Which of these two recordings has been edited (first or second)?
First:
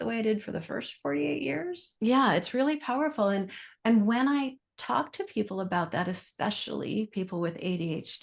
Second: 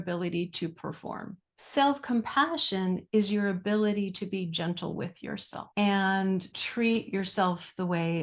second